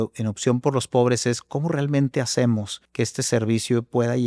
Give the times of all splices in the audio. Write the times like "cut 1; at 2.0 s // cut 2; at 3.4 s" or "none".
cut 1; at 2.8 s